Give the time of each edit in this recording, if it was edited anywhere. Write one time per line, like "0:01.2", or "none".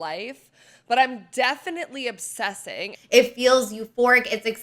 0:02.9